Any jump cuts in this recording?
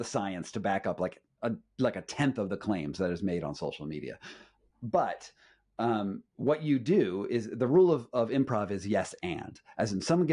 no; 0 cuts

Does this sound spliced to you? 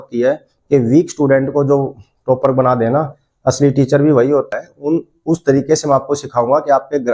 yes; 1 cut; at 4.5 s

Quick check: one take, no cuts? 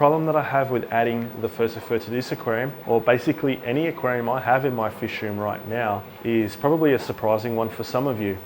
yes; 0 cuts

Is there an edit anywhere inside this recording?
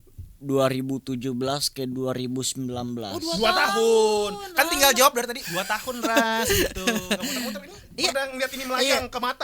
no; 0 cuts

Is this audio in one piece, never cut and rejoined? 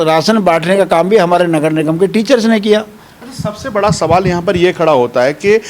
yes; 0 cuts

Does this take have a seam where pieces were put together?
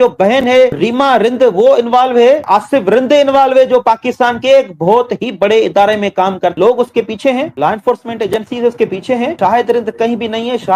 yes; 3 cuts; at 0.8 s, 2.4 s, 6.5 s

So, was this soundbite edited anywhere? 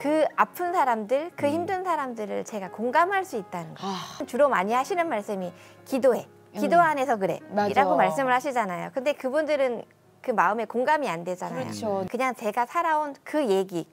yes; 2 cuts; at 4.2 s, 12.1 s

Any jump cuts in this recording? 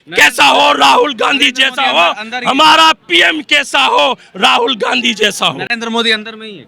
no; 0 cuts

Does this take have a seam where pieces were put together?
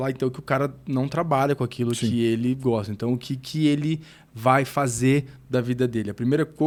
no; 0 cuts

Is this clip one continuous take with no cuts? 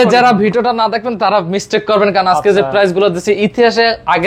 yes; 0 cuts

